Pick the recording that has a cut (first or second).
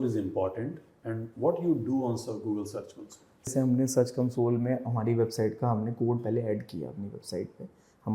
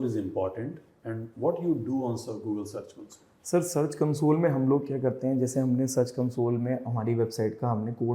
first